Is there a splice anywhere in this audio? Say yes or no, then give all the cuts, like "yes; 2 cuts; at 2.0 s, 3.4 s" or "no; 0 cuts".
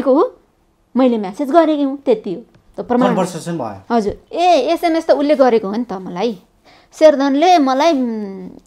yes; 1 cut; at 4.2 s